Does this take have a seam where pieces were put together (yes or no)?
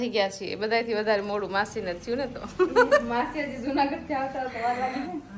no